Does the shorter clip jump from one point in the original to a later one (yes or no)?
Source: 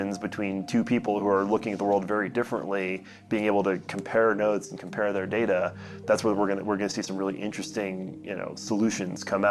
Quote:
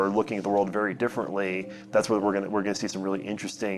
yes